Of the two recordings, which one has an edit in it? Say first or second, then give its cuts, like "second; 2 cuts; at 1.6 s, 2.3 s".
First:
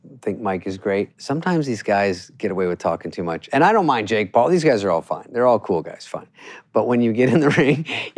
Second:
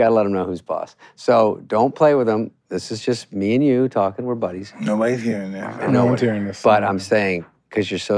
first; 2 cuts; at 1.2 s, 3.4 s